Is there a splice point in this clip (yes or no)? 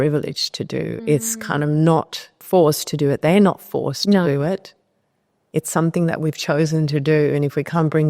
yes